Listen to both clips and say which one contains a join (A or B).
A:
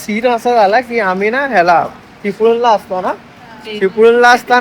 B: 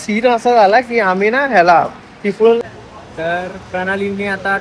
B